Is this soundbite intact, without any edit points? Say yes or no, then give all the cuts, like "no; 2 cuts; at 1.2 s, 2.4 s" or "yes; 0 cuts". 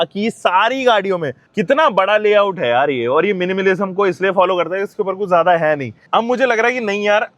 no; 2 cuts; at 1.4 s, 5.9 s